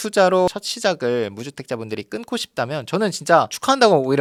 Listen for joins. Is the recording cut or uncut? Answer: uncut